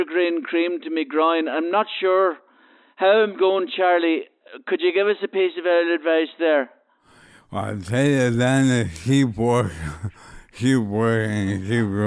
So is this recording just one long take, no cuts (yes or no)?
yes